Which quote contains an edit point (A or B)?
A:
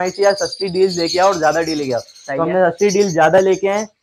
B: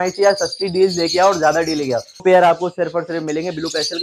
B